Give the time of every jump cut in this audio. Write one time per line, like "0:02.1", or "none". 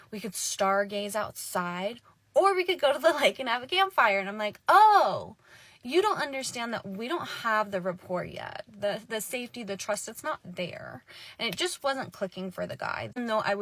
none